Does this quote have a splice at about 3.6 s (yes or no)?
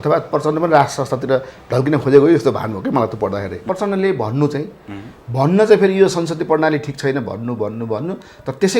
yes